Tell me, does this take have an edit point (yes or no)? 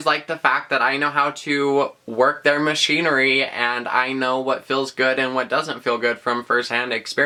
no